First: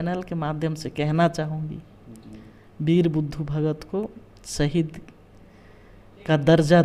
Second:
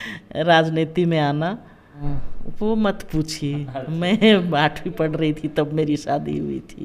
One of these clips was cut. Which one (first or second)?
second